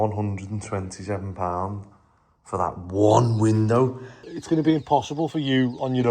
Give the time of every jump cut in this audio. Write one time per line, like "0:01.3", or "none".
0:04.3